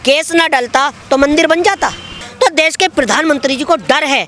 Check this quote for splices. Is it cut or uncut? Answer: cut